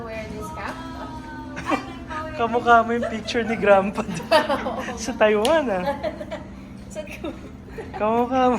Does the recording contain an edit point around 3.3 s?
no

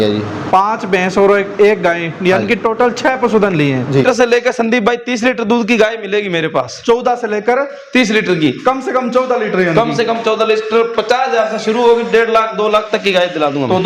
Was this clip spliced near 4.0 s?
yes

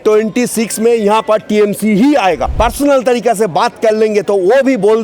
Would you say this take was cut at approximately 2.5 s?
yes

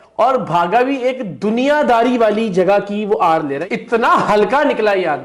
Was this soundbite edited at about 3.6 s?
yes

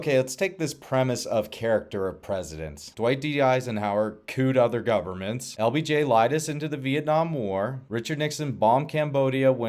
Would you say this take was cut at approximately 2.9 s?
yes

